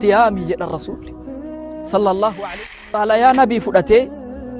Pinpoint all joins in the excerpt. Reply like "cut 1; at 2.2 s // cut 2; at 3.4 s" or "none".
cut 1; at 2.4 s